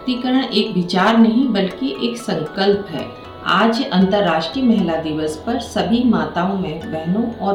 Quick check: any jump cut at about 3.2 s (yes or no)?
no